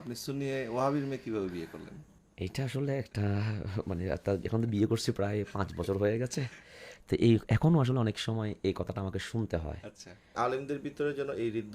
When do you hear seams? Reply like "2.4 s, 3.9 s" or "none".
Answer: 10.3 s